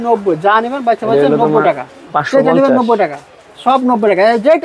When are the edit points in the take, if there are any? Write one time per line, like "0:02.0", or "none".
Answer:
none